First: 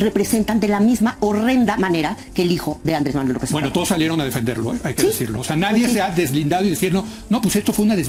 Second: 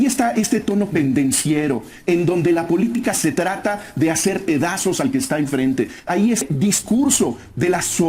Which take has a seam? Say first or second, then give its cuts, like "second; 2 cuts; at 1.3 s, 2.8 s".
second; 1 cut; at 6.4 s